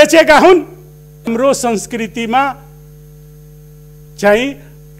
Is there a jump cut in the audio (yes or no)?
yes